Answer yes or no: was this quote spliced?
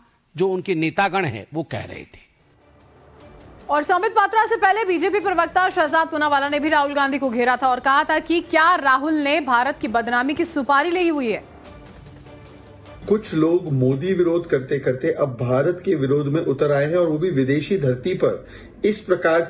no